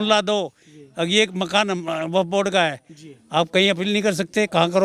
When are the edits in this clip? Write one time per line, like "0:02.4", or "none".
none